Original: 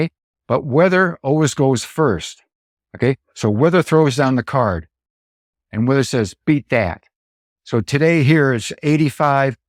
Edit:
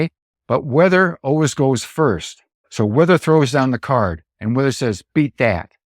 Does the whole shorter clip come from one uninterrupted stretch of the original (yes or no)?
no